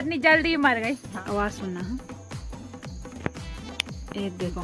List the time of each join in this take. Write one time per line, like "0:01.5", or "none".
0:01.1